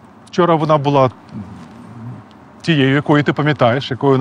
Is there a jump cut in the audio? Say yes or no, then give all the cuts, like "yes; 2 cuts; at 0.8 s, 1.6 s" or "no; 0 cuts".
no; 0 cuts